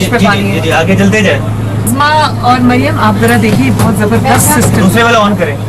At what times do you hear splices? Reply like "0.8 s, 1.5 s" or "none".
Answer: 1.9 s